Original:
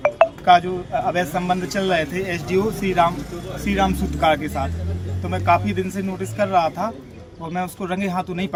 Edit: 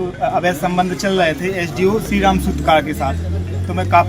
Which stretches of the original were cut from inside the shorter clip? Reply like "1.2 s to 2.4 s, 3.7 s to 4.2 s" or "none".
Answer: 2.8 s to 3.6 s

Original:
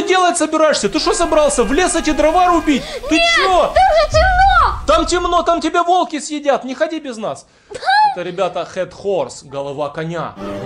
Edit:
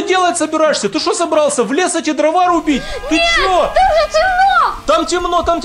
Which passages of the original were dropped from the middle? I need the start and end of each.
none

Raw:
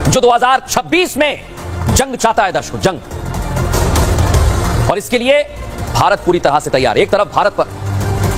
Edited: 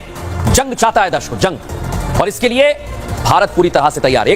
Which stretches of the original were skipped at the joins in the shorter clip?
3.6 s to 4.8 s

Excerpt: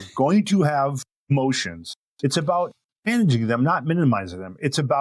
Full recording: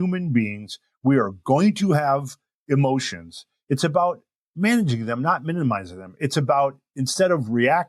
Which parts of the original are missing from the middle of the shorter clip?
2.6 s to 2.8 s, 4.6 s to 4.7 s

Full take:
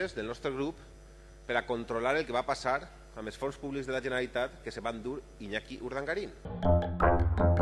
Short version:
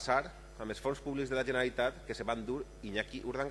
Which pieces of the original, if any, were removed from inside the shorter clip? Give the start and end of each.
none

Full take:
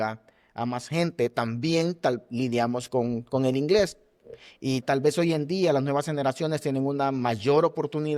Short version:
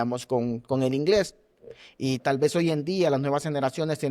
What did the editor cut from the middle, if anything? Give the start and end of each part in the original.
none

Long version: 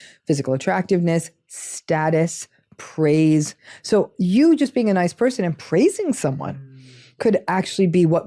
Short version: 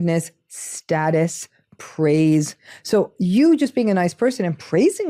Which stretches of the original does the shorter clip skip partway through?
none

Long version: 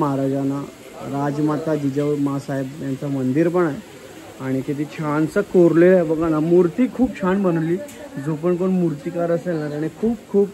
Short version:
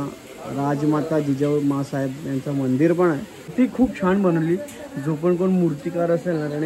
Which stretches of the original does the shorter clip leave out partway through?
4.1 s to 6.7 s

